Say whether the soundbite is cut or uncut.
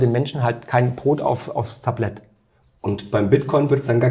uncut